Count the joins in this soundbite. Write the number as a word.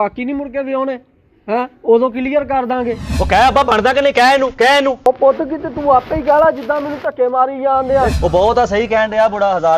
two